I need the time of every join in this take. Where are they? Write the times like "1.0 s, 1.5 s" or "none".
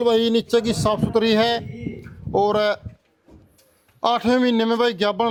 none